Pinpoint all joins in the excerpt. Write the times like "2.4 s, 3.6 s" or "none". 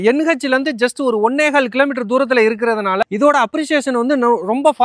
none